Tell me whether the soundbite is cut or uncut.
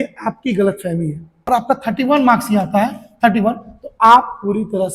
cut